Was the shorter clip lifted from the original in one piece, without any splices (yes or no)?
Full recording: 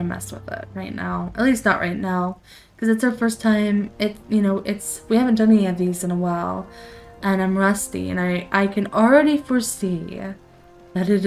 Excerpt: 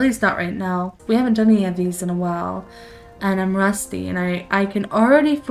no